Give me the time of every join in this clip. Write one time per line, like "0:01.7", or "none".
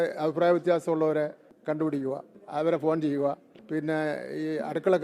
0:01.5
0:02.3
0:03.5